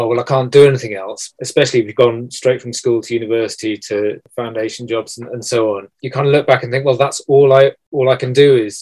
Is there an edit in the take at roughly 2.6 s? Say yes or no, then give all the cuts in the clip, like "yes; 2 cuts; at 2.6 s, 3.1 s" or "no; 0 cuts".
no; 4 cuts; at 1.3 s, 4.2 s, 5.9 s, 7.8 s